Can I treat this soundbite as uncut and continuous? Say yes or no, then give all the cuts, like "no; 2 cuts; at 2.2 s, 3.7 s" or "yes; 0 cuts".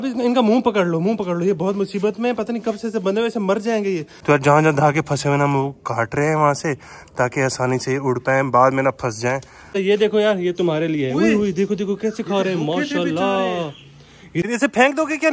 no; 3 cuts; at 4.1 s, 9.7 s, 14.4 s